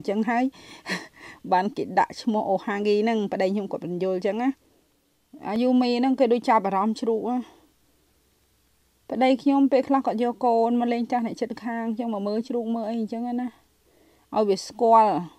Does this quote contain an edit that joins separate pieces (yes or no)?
yes